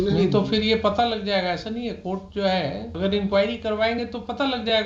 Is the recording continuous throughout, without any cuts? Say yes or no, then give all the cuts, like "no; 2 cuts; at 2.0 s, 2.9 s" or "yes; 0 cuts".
no; 1 cut; at 2.9 s